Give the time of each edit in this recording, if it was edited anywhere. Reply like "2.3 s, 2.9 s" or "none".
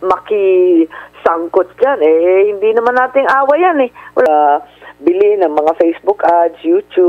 4.3 s